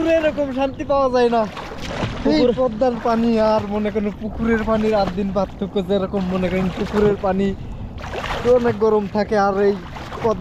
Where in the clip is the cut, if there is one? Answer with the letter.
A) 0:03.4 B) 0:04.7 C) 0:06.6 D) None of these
D